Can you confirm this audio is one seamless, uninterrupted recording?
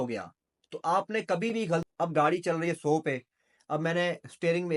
no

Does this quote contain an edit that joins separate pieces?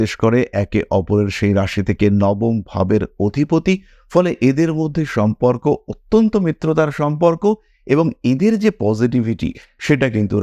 no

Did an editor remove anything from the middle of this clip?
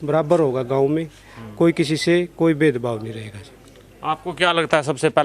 no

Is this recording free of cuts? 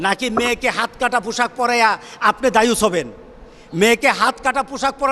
yes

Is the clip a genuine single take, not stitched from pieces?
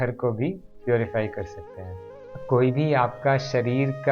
no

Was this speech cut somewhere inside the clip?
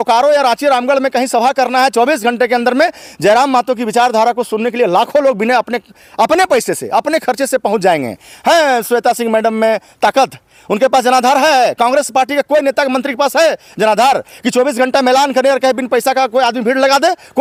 no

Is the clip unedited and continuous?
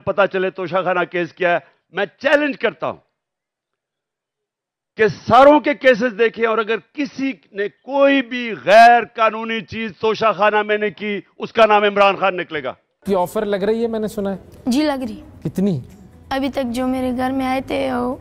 no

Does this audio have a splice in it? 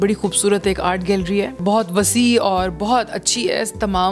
yes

